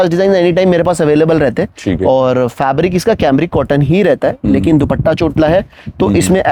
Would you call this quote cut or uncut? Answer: uncut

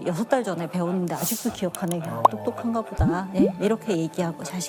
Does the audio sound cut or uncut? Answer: uncut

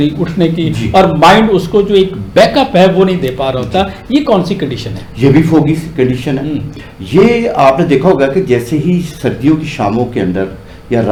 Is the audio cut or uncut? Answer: uncut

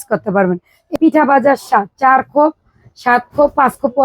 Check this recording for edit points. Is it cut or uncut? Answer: cut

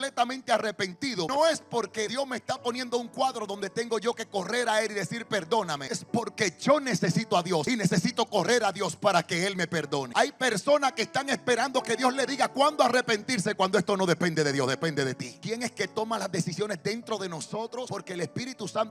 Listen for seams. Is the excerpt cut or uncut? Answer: cut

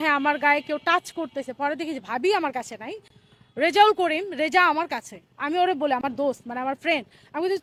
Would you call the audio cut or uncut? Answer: uncut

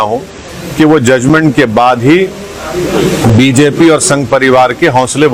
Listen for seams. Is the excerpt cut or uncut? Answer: uncut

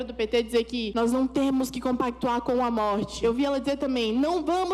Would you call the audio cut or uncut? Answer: cut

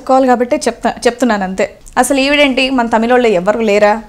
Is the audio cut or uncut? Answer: cut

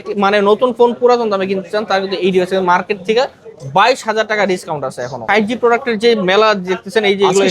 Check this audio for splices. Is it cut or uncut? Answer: cut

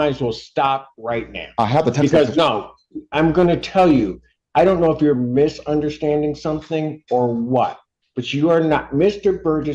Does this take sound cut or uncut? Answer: uncut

